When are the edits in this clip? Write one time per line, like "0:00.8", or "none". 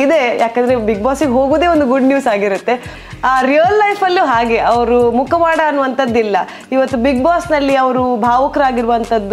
0:03.0

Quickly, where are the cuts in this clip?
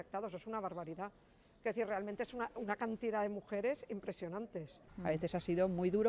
0:01.5
0:04.9

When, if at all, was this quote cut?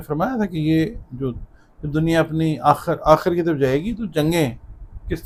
none

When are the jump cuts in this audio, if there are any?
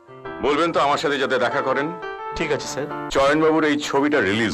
0:03.0

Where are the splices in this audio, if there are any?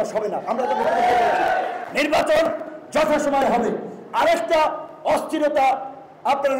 none

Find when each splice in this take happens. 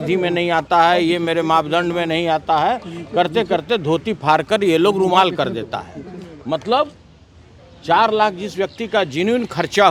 none

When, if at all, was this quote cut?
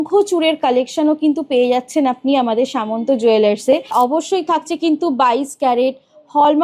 0:03.9

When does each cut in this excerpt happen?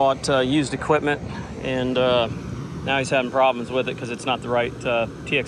none

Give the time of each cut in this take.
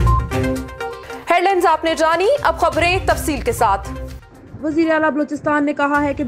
none

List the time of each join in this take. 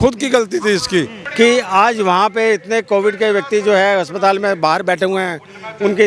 0:01.2

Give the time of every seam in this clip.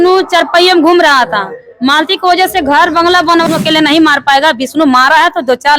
0:03.4

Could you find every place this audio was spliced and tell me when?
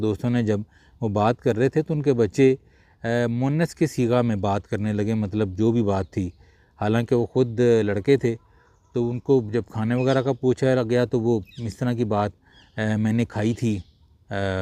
none

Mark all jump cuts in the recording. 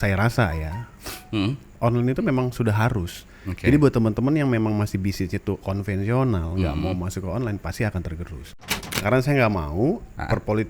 0:09.0

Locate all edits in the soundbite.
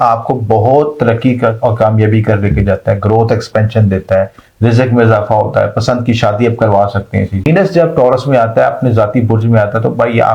0:07.5

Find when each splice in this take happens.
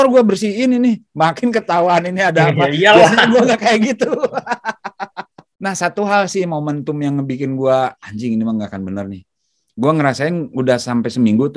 0:05.4

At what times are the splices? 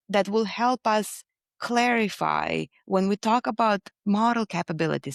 none

